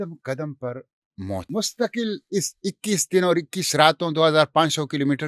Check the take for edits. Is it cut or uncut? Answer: cut